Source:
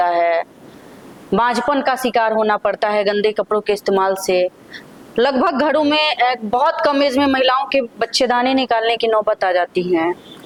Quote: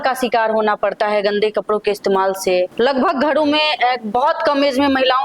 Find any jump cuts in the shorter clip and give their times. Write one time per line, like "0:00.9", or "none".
0:02.7

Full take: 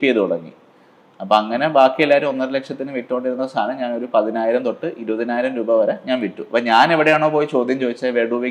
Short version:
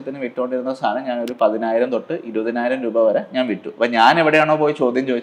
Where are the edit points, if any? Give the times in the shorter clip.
none

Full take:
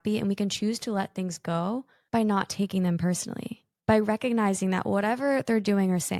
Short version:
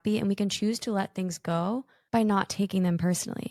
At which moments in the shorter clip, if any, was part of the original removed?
none

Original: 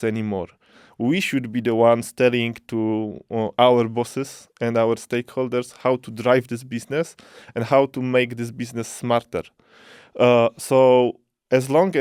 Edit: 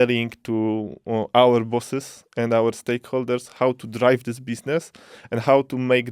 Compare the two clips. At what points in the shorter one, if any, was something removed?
none

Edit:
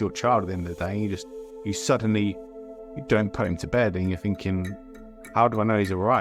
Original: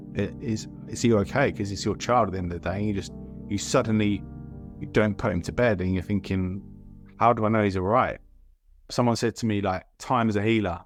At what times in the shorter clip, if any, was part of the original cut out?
none

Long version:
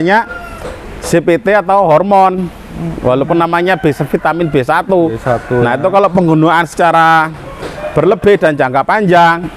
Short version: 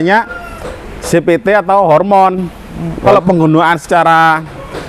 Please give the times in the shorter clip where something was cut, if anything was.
0:03.0

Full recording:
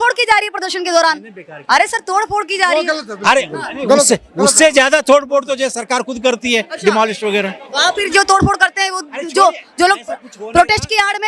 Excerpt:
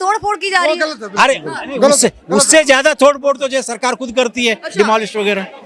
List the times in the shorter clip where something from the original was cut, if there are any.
none

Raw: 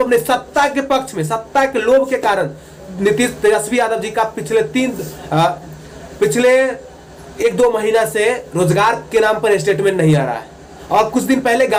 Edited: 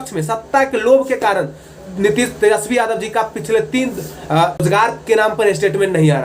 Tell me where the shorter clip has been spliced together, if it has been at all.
0:04.6

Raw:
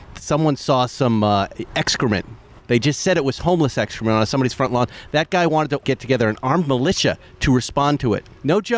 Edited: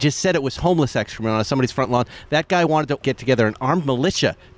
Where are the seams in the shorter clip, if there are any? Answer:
none

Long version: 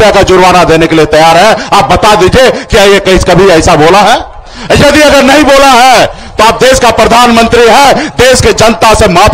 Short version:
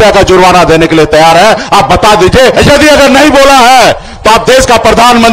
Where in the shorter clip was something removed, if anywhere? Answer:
0:02.5

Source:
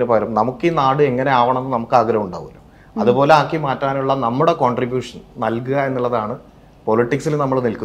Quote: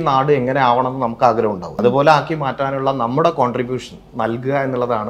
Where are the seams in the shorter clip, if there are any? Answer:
0:01.7

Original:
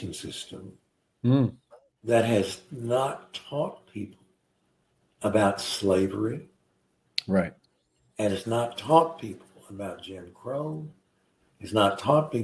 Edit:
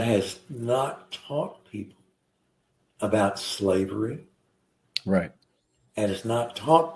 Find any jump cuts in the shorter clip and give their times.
none

